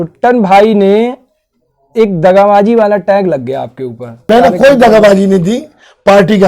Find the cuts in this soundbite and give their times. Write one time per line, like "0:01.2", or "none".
0:04.2